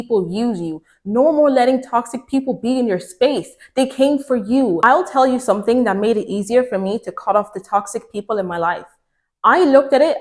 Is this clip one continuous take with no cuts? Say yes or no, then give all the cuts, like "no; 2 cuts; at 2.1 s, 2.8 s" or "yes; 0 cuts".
no; 1 cut; at 4.8 s